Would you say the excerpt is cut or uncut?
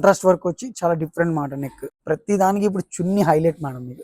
cut